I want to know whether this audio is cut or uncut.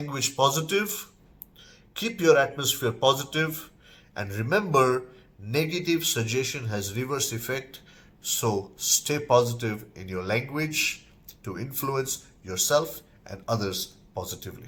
uncut